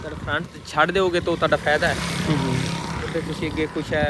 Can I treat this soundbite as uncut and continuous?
yes; 0 cuts

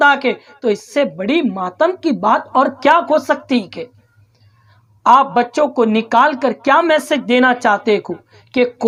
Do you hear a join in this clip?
no; 0 cuts

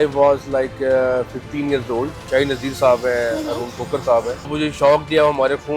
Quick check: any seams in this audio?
yes; 2 cuts; at 2.2 s, 4.5 s

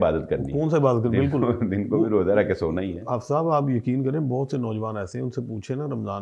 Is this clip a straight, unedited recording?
yes; 0 cuts

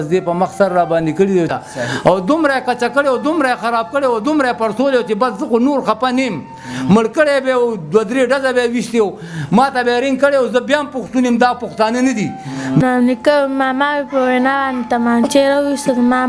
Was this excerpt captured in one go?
no; 2 cuts; at 1.5 s, 12.8 s

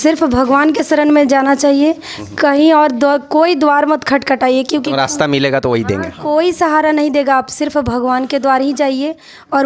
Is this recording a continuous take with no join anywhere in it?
yes; 0 cuts

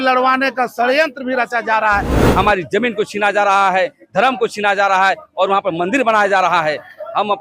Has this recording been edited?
yes; 1 cut; at 2.2 s

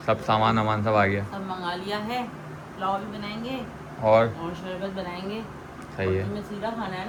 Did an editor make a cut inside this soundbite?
no; 0 cuts

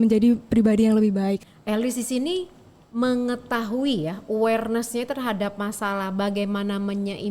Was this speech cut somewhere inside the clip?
yes; 1 cut; at 1.5 s

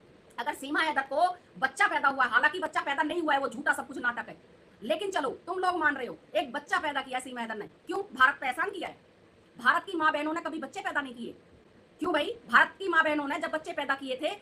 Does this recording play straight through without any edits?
yes; 0 cuts

